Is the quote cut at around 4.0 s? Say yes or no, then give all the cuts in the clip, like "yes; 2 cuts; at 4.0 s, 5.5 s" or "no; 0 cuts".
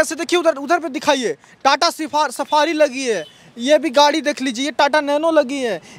no; 0 cuts